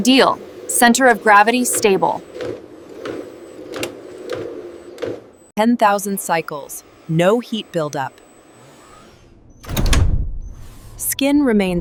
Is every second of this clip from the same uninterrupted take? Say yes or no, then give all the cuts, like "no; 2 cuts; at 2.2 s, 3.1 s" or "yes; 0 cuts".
yes; 0 cuts